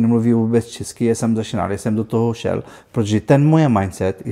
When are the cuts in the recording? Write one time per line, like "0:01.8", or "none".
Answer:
none